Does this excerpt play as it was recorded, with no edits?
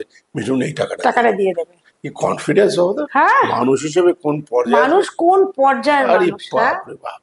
yes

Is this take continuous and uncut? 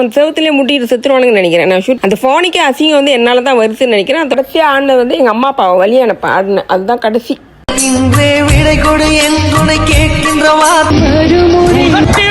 no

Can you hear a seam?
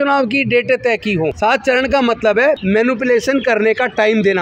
yes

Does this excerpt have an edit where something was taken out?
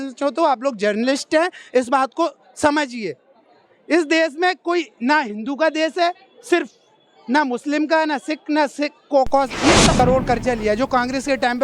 yes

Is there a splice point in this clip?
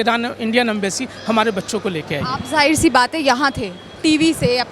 no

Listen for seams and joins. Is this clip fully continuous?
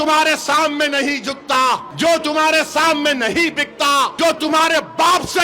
no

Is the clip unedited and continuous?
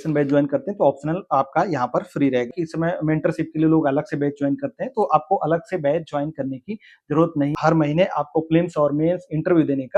no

